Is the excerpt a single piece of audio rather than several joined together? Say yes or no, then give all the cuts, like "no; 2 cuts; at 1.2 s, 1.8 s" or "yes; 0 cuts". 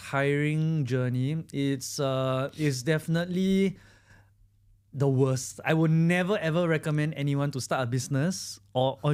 yes; 0 cuts